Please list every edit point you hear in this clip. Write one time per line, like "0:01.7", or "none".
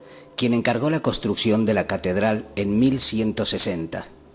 0:01.4